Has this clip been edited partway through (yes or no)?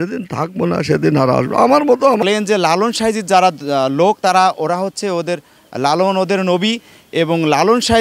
yes